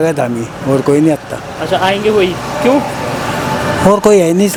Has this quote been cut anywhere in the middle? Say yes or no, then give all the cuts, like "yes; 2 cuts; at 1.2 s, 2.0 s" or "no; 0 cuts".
no; 0 cuts